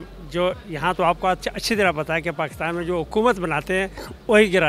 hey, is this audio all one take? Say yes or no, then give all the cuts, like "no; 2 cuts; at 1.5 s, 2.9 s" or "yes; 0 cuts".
yes; 0 cuts